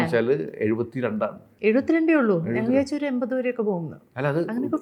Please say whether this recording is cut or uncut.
uncut